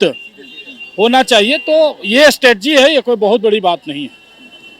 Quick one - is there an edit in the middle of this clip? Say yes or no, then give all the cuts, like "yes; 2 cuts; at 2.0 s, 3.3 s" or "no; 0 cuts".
no; 0 cuts